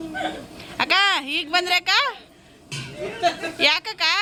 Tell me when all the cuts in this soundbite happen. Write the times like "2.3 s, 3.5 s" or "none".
none

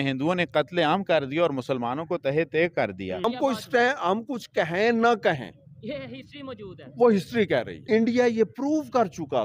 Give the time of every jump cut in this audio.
3.2 s, 7.8 s

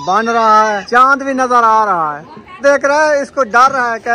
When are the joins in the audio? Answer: 0.8 s, 2.6 s

